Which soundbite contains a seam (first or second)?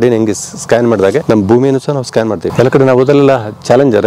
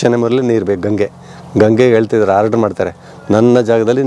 first